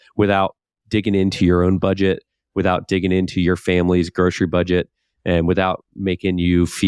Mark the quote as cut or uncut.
uncut